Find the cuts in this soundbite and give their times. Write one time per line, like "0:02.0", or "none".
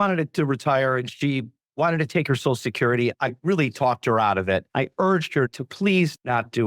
none

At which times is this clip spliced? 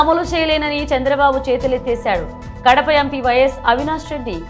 none

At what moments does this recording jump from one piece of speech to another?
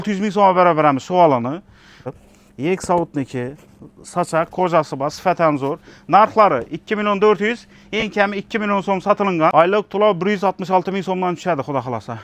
0:02.1
0:09.5

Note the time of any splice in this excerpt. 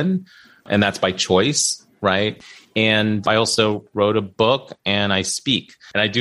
0:02.4

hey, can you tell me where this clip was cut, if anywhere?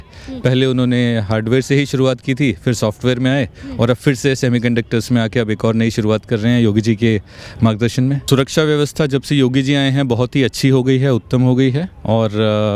0:08.2

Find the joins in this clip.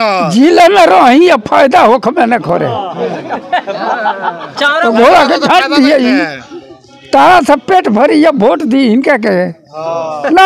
none

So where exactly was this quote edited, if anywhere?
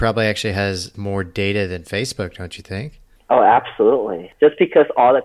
0:01.0
0:04.2

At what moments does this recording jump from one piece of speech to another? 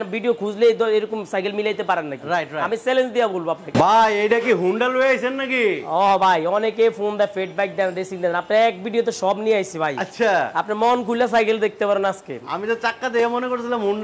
0:03.7

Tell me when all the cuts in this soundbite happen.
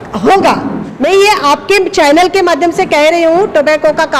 0:01.1

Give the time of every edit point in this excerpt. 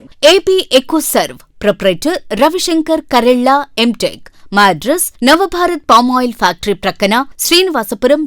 none

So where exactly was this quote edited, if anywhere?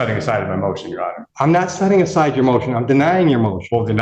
0:01.2

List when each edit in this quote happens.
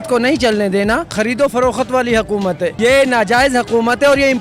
0:01.1
0:02.7

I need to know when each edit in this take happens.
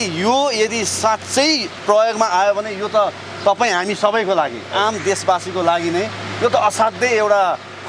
none

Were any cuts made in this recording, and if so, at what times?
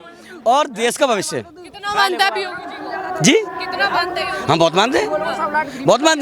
none

